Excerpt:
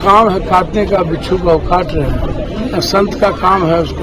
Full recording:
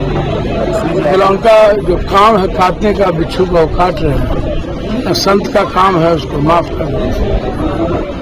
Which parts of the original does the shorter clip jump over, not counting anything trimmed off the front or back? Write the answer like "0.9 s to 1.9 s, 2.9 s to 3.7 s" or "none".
4.5 s to 4.8 s